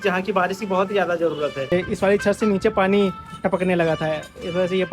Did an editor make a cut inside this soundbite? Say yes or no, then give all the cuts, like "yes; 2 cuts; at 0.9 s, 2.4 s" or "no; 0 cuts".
yes; 1 cut; at 1.7 s